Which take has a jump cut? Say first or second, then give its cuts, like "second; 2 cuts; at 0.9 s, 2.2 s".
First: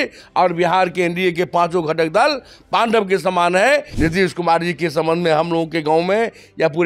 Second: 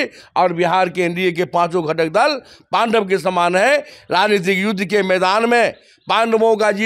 first; 1 cut; at 3.9 s